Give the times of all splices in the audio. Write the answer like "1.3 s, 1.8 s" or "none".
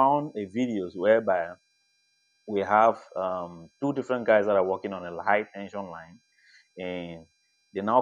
0.9 s